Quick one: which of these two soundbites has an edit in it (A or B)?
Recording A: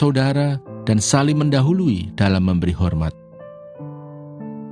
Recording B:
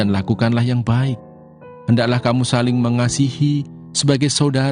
A